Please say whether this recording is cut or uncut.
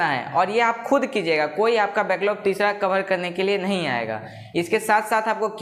uncut